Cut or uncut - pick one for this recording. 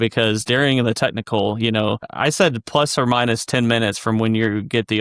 cut